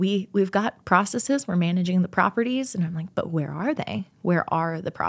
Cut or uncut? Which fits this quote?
uncut